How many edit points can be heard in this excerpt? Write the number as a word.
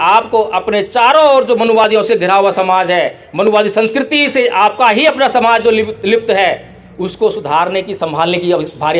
zero